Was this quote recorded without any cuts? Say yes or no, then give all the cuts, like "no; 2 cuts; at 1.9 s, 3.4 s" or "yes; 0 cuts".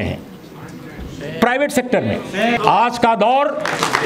no; 1 cut; at 2.6 s